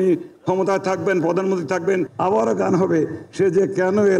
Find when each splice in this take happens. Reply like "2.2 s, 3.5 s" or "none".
2.1 s